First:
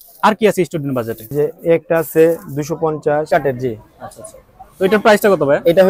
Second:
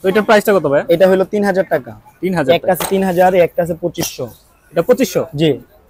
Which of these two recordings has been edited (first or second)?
first